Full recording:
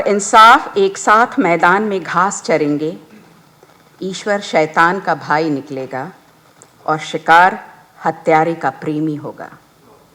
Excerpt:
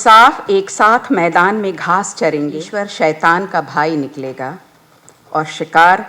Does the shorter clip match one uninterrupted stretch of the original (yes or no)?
no